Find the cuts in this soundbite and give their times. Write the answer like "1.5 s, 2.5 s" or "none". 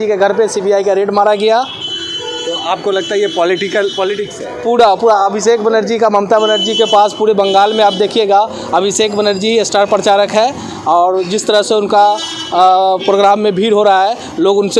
none